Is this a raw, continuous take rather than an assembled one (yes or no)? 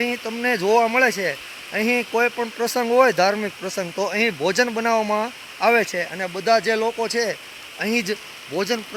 yes